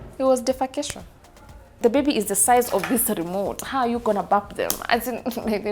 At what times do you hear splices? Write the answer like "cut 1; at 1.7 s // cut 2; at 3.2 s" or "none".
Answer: cut 1; at 1.8 s